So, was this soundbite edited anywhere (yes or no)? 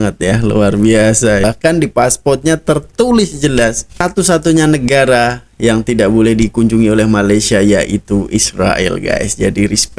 yes